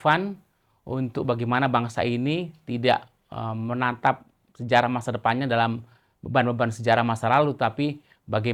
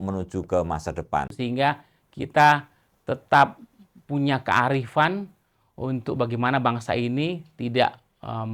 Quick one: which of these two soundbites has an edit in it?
second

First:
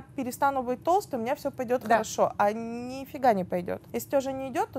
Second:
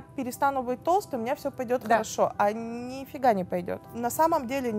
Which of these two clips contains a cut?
second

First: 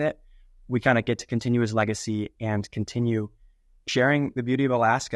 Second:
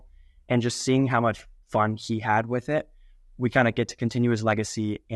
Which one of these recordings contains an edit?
first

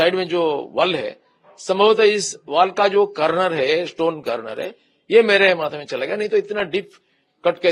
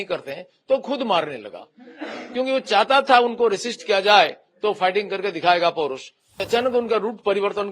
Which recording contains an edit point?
second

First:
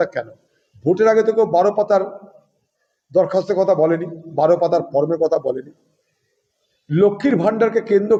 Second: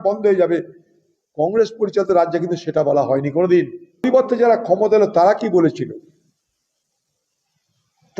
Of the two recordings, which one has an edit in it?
second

